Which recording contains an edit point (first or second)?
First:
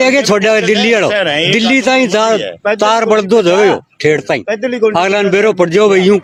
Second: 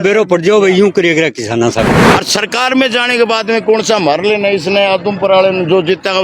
second